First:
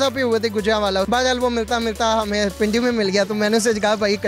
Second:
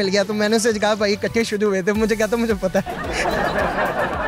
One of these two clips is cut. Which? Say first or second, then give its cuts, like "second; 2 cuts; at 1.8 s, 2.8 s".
first; 1 cut; at 1.1 s